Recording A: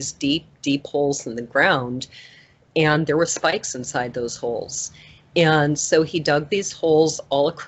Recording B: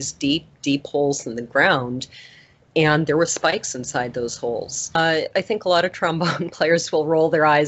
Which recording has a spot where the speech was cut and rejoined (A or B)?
B